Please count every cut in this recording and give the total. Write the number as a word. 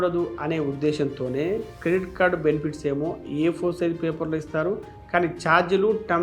zero